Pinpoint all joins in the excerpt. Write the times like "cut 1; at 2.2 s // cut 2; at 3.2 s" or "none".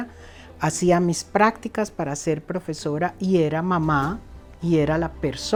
none

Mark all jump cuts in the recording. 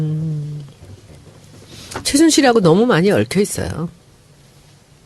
cut 1; at 3.2 s

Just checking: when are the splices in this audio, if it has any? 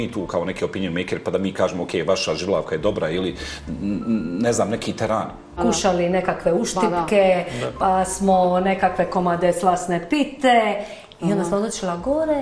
cut 1; at 5.6 s

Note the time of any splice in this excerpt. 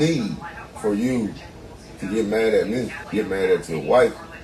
cut 1; at 3.0 s

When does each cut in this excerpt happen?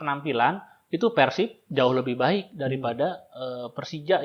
none

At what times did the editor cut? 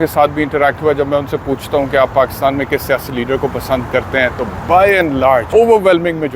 cut 1; at 5.5 s

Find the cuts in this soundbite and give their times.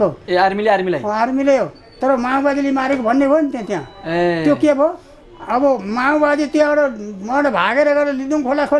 none

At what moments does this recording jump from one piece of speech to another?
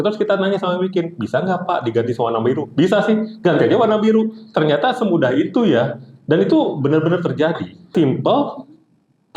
cut 1; at 7.9 s

